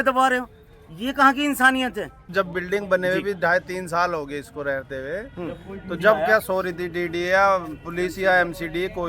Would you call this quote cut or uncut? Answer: cut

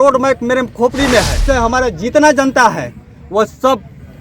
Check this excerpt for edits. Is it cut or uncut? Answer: cut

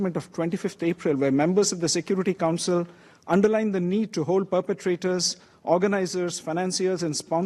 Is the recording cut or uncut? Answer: uncut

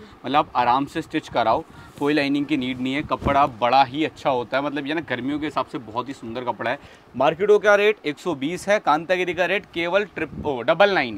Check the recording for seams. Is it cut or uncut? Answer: cut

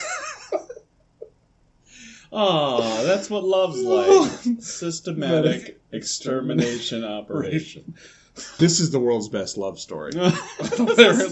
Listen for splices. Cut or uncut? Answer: cut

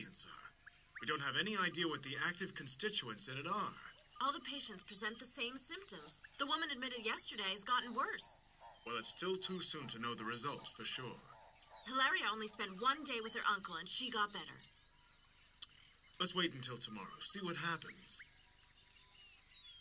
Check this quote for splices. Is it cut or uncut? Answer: cut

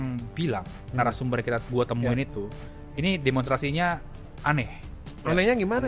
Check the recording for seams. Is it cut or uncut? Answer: uncut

